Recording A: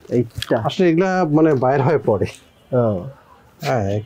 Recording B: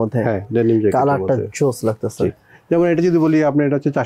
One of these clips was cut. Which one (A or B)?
B